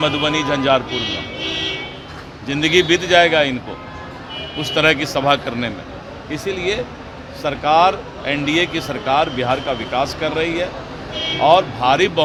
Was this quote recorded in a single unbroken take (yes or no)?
yes